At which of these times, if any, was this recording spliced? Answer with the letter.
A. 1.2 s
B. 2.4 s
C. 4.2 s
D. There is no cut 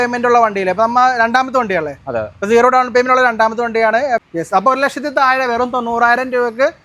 C